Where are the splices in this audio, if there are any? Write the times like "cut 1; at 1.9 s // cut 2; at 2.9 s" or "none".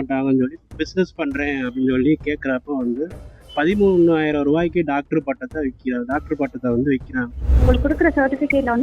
cut 1; at 7.5 s